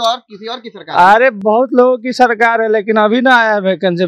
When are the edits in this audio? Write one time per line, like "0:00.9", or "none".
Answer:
none